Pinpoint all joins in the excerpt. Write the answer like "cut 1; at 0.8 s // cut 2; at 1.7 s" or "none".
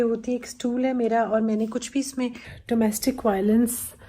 cut 1; at 2.5 s